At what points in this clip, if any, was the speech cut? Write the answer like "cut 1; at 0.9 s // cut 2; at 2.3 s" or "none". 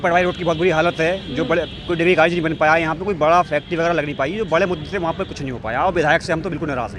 none